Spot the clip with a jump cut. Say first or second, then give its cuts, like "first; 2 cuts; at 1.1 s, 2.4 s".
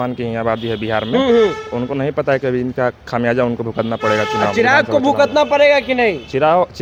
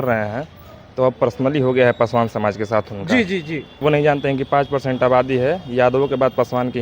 second; 1 cut; at 3.8 s